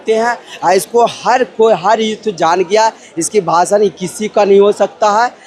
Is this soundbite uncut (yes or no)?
yes